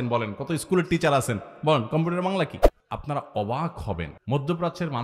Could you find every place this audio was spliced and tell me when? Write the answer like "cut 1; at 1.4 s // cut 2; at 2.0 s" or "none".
cut 1; at 2.7 s // cut 2; at 4.1 s